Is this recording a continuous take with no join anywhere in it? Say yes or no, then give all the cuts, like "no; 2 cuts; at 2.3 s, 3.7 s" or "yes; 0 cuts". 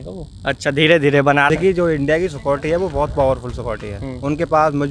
no; 1 cut; at 1.5 s